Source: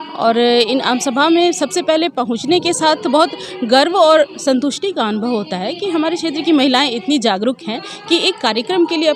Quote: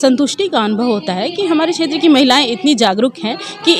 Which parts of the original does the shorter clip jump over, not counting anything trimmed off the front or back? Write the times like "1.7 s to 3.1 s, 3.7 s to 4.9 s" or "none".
none